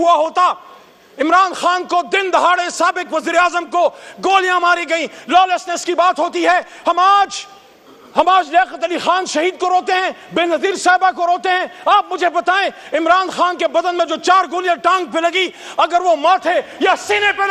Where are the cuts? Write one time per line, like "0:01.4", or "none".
none